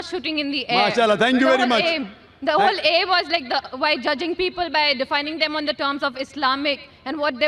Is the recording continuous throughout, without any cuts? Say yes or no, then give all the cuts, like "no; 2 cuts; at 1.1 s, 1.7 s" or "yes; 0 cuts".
yes; 0 cuts